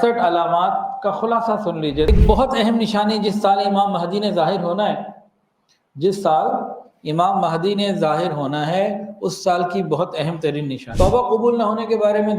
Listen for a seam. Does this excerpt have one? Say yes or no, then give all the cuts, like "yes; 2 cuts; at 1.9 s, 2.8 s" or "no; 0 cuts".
yes; 2 cuts; at 2.1 s, 10.8 s